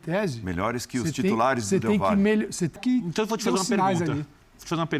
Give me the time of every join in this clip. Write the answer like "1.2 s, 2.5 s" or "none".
2.8 s